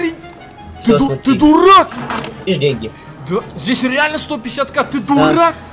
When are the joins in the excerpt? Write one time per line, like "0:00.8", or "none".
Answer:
0:02.4